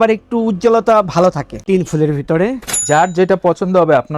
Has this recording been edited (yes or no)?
yes